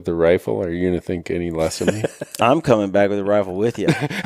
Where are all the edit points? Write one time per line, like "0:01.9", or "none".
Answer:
none